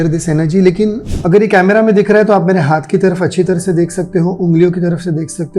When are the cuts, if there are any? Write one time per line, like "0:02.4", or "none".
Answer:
0:01.1